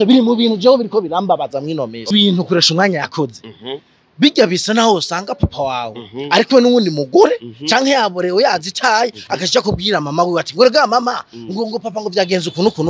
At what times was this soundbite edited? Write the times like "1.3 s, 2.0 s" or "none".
2.1 s

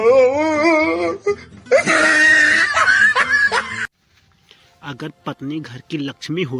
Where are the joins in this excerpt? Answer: 1.8 s, 4.0 s

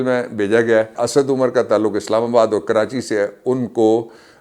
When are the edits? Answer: 1.0 s

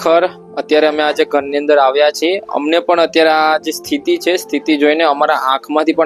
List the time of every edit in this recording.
none

